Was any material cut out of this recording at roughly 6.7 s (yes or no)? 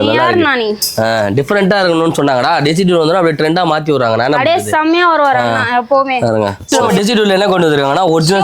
yes